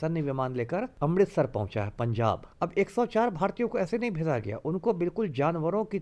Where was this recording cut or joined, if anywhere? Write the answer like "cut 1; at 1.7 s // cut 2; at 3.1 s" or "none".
cut 1; at 0.9 s // cut 2; at 2.5 s